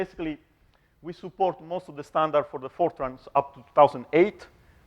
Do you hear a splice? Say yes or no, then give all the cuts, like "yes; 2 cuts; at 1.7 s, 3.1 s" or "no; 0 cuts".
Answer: yes; 1 cut; at 2.0 s